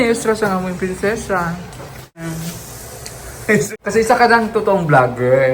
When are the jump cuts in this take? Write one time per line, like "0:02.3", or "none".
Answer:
0:02.2
0:03.7